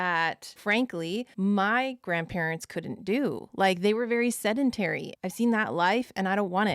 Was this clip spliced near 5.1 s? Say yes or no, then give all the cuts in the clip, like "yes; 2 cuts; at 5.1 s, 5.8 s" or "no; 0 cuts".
yes; 1 cut; at 5.1 s